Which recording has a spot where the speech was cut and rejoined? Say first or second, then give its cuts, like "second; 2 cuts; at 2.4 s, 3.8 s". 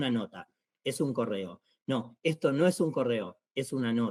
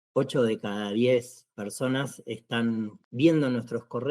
second; 1 cut; at 3.0 s